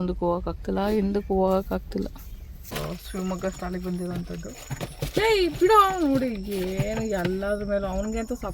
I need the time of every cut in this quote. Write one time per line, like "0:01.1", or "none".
0:02.7